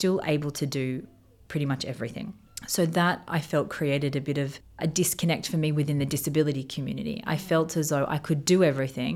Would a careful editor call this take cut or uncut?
cut